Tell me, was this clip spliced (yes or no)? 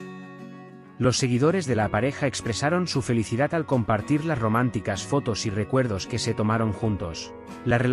no